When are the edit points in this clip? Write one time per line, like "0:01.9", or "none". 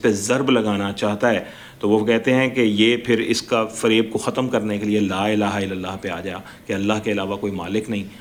none

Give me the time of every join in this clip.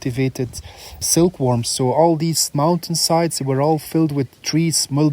0:01.1

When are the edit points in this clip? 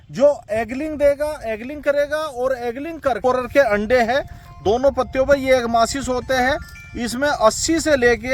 0:03.2

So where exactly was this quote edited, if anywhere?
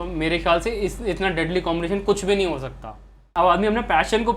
0:03.3

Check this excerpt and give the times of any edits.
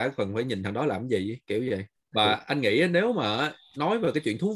0:02.0

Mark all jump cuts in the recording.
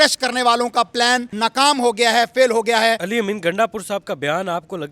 0:01.3
0:03.0

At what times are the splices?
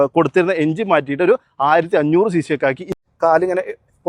0:03.0

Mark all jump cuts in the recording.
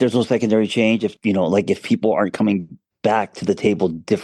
0:01.1

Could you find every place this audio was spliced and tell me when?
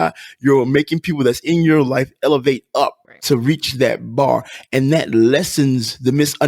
0:03.1

